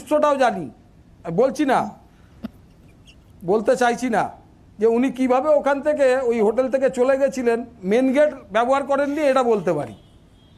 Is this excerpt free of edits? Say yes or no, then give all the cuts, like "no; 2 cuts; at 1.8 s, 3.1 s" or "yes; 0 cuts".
yes; 0 cuts